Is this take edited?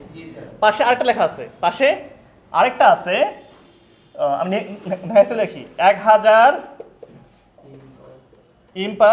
no; 0 cuts

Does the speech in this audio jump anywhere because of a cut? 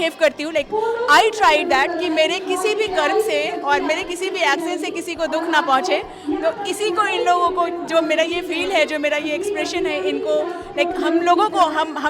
no; 0 cuts

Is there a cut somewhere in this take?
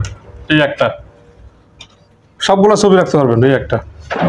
no; 0 cuts

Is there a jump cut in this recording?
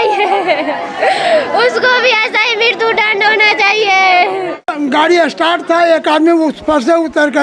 yes; 1 cut; at 4.6 s

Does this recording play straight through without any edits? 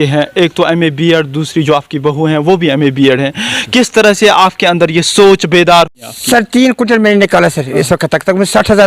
no; 1 cut; at 6.0 s

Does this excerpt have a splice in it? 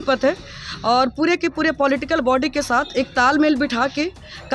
no; 0 cuts

